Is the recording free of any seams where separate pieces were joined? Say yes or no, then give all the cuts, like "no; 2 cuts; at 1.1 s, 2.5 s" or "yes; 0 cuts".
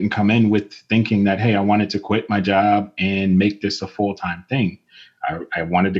yes; 0 cuts